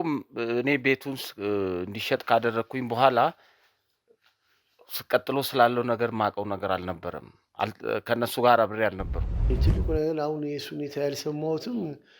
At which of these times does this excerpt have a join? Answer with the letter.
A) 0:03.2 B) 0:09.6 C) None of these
B